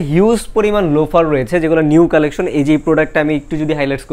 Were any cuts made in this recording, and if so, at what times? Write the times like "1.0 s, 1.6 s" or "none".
none